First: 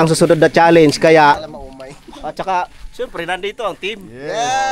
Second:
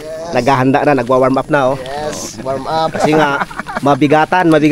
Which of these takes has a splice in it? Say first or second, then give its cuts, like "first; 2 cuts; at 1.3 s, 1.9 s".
first; 1 cut; at 1.6 s